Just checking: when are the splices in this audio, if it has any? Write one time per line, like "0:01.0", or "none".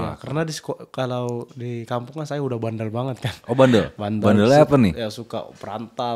none